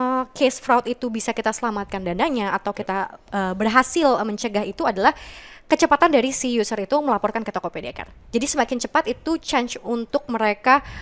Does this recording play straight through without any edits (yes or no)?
yes